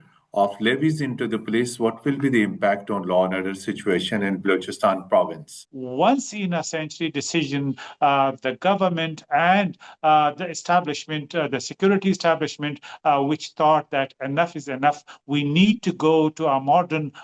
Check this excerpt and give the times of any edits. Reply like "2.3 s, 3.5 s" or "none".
5.5 s